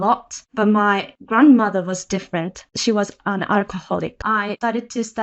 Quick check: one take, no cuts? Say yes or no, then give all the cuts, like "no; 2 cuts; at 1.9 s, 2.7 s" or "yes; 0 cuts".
no; 1 cut; at 4.2 s